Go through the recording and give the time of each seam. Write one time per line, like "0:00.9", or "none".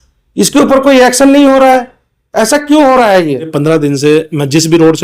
0:03.5